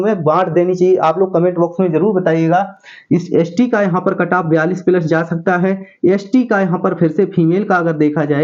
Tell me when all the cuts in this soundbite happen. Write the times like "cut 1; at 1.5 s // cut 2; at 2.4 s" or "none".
none